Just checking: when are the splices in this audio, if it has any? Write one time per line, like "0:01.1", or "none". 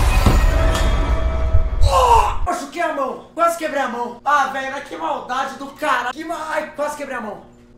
0:02.4